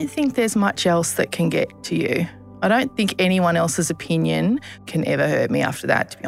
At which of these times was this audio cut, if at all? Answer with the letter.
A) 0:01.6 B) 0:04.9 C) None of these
B